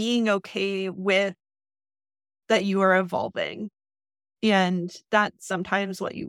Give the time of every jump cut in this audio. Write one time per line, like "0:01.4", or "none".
none